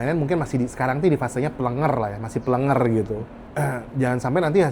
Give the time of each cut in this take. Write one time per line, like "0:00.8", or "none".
0:03.4